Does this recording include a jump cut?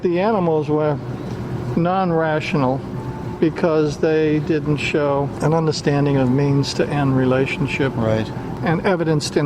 yes; 2 cuts; at 5.3 s, 8.6 s

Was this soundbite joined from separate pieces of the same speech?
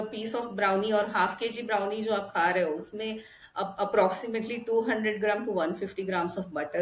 no; 0 cuts

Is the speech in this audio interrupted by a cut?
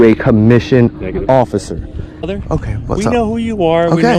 yes; 1 cut; at 2.2 s

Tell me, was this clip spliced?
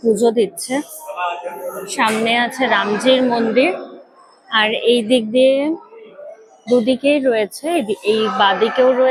no; 0 cuts

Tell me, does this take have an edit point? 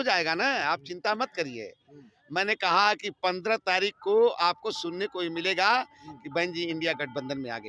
no; 0 cuts

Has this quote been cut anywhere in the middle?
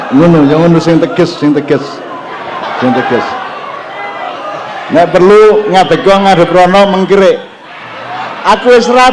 no; 0 cuts

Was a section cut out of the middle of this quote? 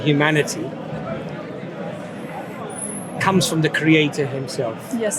no; 0 cuts

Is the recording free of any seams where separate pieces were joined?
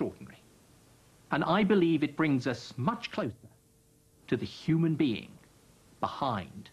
no; 1 cut; at 2.3 s

